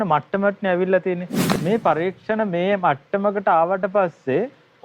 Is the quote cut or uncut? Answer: cut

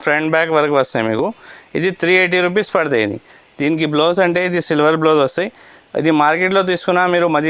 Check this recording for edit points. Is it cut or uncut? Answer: uncut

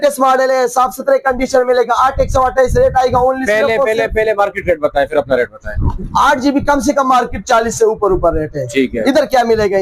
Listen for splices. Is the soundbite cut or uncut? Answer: uncut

